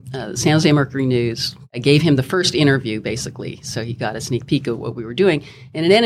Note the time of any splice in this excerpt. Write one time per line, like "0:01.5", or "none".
0:01.7

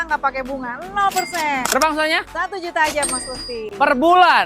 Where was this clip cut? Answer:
0:01.6

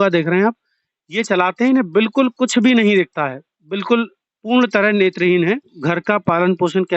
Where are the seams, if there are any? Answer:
0:05.8

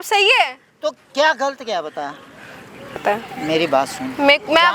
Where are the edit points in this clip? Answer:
0:03.0

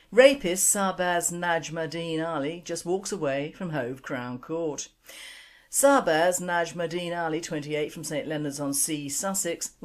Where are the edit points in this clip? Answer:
0:02.8

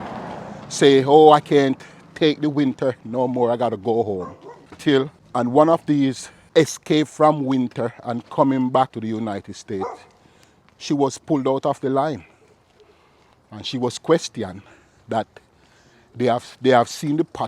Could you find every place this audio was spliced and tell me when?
0:05.1
0:06.3
0:09.0

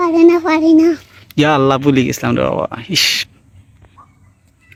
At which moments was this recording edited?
none

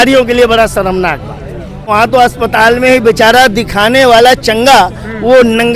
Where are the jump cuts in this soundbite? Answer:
0:01.9

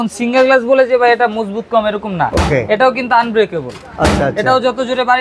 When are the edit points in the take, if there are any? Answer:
none

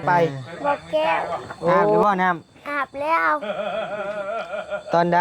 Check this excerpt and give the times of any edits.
0:02.0

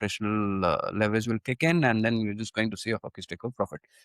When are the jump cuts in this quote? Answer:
none

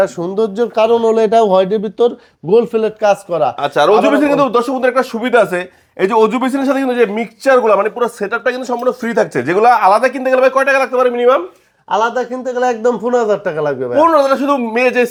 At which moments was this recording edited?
none

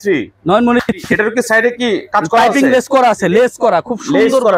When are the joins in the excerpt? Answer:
none

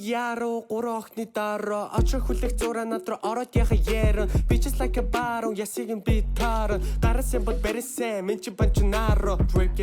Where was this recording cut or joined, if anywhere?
0:03.3

